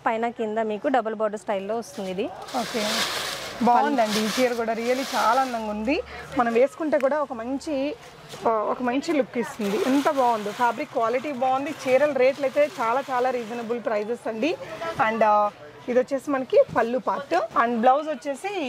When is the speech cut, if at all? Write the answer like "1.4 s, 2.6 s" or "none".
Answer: none